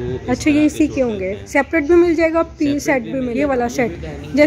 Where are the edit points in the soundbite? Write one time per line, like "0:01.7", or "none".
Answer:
0:03.3

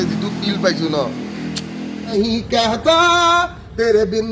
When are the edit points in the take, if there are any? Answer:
0:02.0

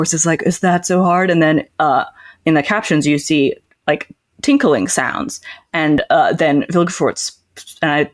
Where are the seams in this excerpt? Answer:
none

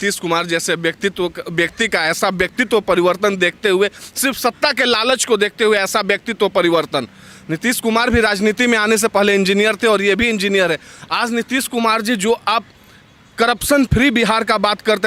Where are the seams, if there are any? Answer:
none

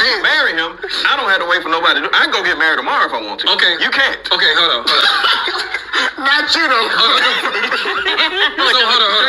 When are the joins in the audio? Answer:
none

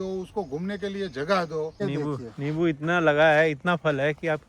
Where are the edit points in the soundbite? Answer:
0:01.8

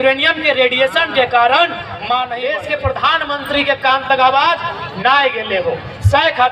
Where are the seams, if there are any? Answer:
0:02.6

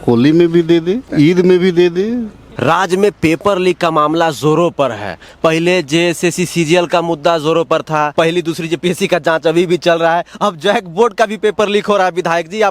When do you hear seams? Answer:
0:01.0
0:02.5
0:08.1

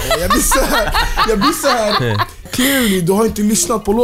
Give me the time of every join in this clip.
0:02.4

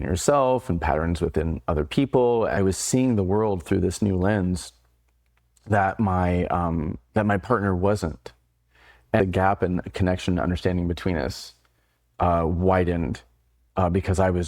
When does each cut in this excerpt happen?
0:02.6
0:09.2

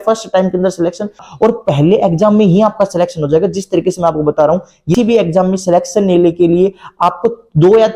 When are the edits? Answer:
0:01.3
0:04.9

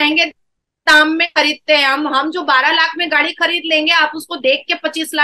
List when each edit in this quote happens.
none

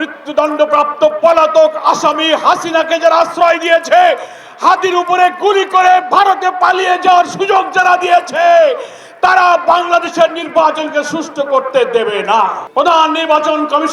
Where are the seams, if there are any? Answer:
0:12.6

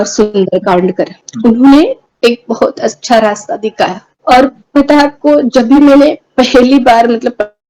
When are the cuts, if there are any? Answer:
0:01.2
0:02.0
0:04.1

